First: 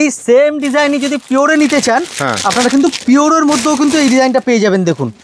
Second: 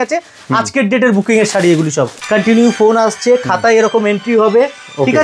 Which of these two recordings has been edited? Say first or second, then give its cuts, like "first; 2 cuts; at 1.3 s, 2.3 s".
second; 1 cut; at 2.2 s